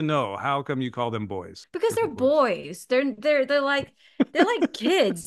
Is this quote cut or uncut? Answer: cut